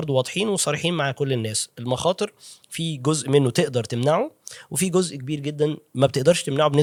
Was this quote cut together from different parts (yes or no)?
no